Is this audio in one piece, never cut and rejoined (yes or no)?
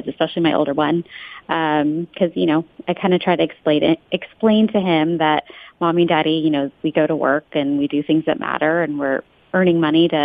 yes